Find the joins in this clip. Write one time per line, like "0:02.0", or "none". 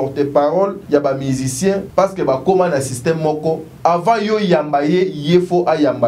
0:00.8
0:01.9
0:03.7